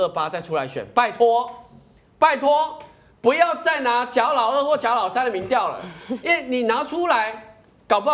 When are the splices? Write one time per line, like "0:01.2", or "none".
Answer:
none